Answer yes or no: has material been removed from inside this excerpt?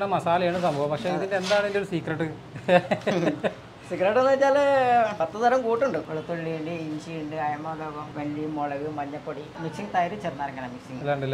yes